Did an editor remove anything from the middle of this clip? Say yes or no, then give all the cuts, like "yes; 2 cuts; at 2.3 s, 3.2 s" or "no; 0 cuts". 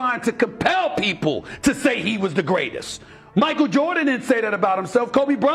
no; 0 cuts